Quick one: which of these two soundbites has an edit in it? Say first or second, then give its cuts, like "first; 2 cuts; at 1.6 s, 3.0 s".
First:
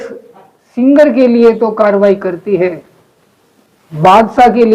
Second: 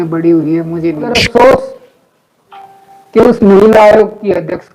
second; 1 cut; at 1.2 s